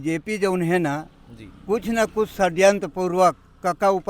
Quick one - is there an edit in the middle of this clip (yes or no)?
no